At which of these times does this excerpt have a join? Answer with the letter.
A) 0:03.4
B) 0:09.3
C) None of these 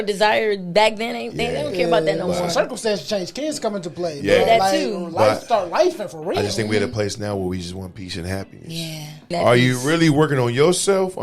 B